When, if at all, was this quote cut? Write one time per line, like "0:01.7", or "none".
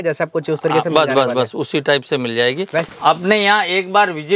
0:02.9